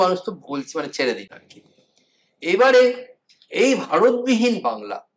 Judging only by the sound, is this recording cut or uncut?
uncut